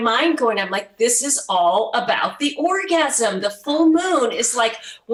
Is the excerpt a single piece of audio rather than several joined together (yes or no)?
yes